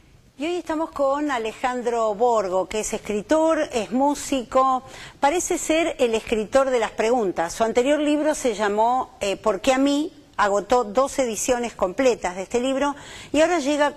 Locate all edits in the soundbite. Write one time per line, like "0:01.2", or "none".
0:05.1